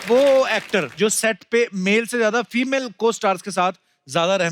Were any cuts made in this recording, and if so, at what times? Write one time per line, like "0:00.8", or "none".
0:00.9